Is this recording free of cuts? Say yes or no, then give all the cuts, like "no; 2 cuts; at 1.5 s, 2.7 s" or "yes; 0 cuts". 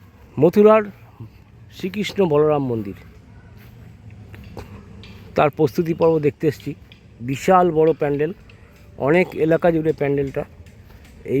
yes; 0 cuts